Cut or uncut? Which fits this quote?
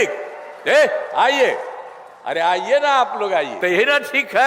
cut